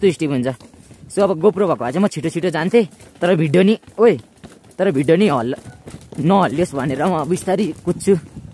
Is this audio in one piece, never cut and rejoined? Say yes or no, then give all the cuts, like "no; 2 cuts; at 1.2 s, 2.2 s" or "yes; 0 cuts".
yes; 0 cuts